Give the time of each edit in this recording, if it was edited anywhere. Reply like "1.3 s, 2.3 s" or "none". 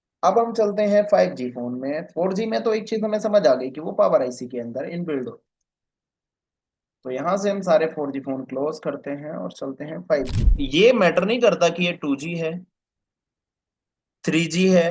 10.4 s